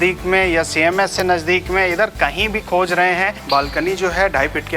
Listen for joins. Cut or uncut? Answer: cut